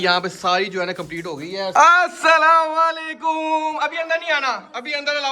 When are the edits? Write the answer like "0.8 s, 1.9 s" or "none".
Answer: 1.7 s

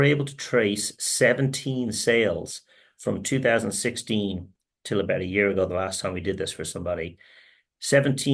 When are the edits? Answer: none

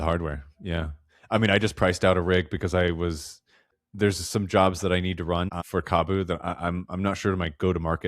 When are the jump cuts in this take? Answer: 3.7 s, 5.6 s

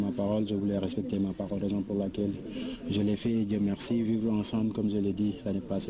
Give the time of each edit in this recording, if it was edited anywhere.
none

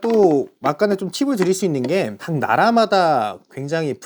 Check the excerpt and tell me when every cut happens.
2.2 s

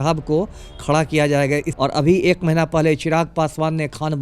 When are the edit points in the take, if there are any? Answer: 1.7 s

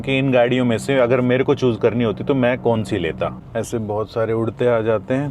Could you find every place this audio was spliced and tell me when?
3.4 s

